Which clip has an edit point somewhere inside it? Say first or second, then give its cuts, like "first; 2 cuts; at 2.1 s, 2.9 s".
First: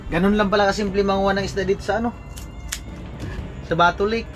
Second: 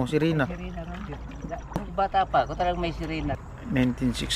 second; 2 cuts; at 1.9 s, 3.5 s